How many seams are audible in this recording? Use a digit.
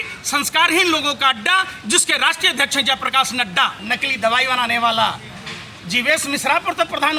1